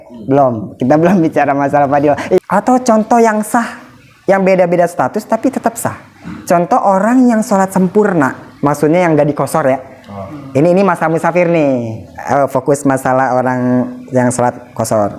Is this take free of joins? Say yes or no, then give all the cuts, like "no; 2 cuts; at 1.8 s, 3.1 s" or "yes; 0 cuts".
no; 1 cut; at 2.4 s